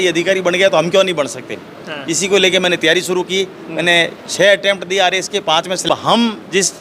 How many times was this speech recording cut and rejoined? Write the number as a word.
one